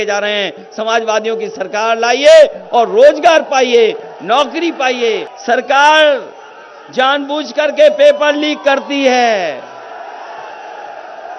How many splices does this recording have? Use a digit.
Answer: 1